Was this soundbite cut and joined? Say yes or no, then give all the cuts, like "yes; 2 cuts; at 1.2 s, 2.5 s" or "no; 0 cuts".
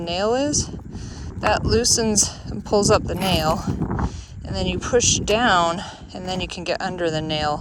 no; 0 cuts